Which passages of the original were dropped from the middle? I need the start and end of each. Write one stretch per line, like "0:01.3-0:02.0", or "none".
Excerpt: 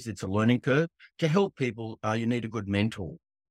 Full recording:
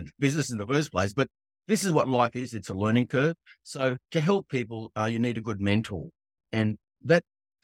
0:03.6-0:04.0